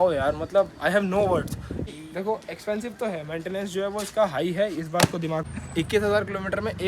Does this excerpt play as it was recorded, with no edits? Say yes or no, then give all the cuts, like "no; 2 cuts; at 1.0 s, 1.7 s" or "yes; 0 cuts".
no; 2 cuts; at 1.9 s, 5.5 s